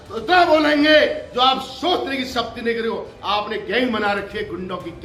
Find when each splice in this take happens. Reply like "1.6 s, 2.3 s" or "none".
none